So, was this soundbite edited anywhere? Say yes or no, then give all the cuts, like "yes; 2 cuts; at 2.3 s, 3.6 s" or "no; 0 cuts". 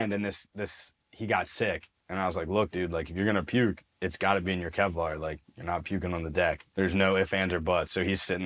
yes; 1 cut; at 1.9 s